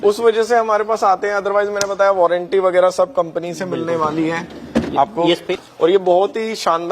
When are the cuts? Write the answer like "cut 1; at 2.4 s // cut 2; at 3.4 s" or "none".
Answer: cut 1; at 5.4 s

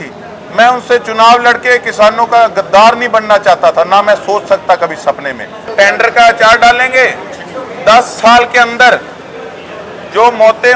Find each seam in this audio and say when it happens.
cut 1; at 5.6 s

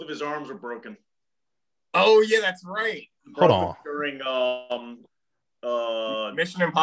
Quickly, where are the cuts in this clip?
none

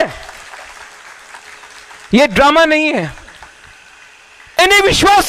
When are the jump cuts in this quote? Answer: cut 1; at 2.1 s

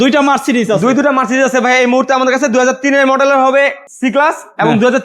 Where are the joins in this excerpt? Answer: none

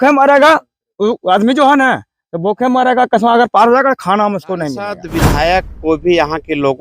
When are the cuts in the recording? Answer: cut 1; at 5.0 s

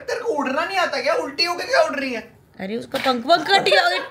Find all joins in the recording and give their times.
none

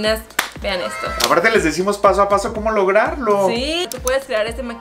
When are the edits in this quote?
cut 1; at 1.1 s // cut 2; at 3.9 s

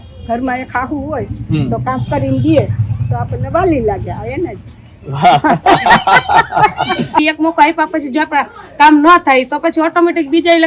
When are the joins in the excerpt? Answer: cut 1; at 7.2 s

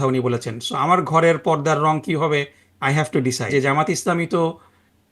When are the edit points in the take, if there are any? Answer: cut 1; at 3.5 s

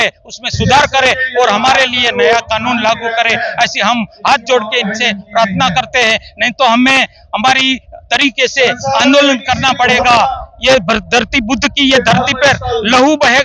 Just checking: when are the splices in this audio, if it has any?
none

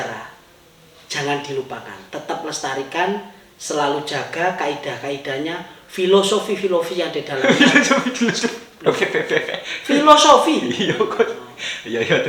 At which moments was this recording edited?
none

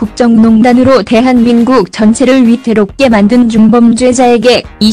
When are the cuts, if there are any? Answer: cut 1; at 3.7 s

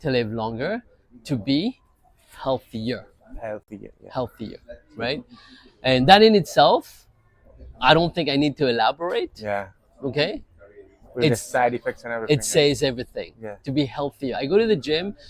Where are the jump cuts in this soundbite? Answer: none

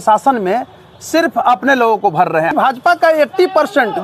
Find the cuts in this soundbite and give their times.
cut 1; at 2.5 s

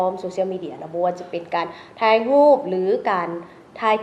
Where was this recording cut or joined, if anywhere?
none

